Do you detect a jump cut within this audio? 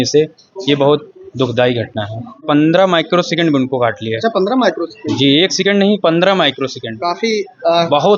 yes; 1 cut; at 2.4 s

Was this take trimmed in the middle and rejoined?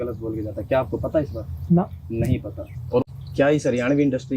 yes; 1 cut; at 3.1 s

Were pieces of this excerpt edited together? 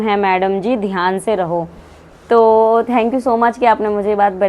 no; 0 cuts

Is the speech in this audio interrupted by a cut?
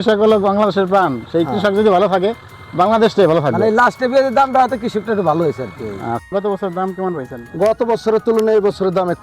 yes; 1 cut; at 6.2 s

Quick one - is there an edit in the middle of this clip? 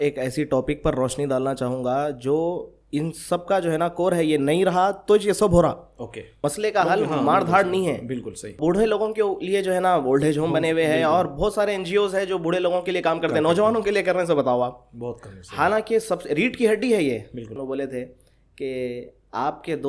yes; 3 cuts; at 6.2 s, 8.6 s, 17.6 s

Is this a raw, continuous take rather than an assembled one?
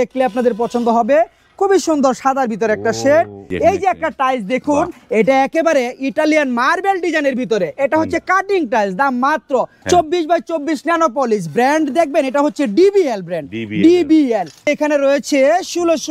no; 3 cuts; at 3.4 s, 9.8 s, 14.6 s

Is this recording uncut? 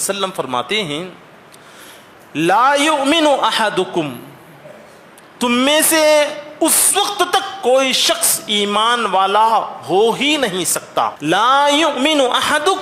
no; 1 cut; at 11.2 s

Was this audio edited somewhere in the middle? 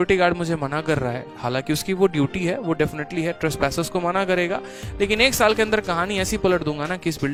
no; 0 cuts

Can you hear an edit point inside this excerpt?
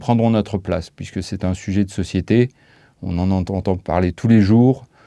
no; 0 cuts

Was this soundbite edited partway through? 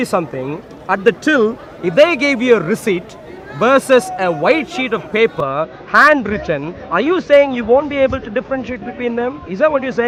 no; 0 cuts

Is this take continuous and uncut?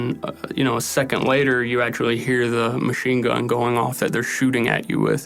yes; 0 cuts

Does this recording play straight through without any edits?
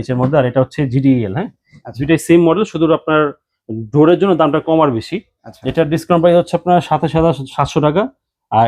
yes; 0 cuts

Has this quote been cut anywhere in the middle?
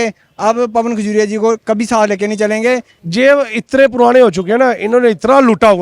yes; 1 cut; at 3.0 s

